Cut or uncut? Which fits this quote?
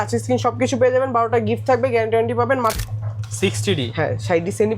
cut